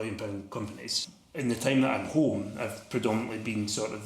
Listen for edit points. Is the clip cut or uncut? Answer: cut